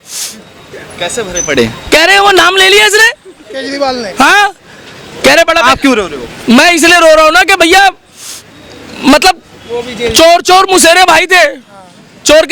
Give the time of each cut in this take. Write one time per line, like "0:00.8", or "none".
none